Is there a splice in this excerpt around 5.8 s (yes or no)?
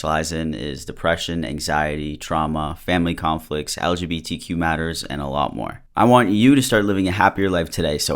yes